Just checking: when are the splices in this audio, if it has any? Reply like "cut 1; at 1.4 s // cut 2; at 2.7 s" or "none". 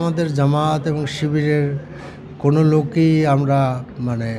none